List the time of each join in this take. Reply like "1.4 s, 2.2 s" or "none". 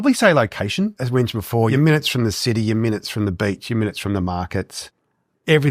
1.0 s

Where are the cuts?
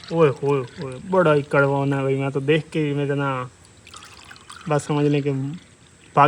none

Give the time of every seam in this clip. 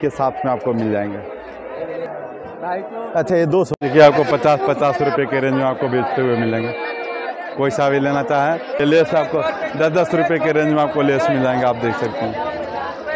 3.7 s, 8.8 s

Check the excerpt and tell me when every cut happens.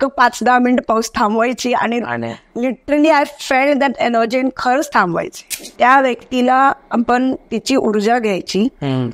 5.7 s

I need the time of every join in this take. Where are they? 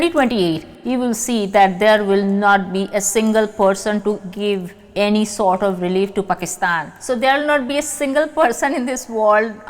4.2 s

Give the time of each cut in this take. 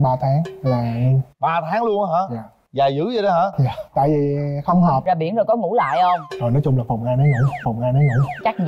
5.0 s

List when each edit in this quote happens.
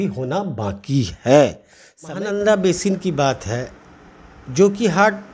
2.1 s

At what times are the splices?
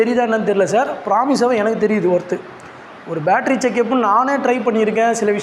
none

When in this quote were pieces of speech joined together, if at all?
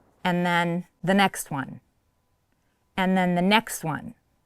0.9 s

